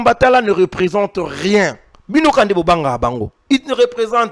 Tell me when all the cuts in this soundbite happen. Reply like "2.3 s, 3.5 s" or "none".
1.9 s